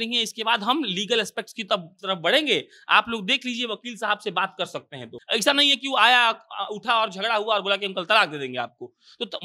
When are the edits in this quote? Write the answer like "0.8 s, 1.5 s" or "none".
5.1 s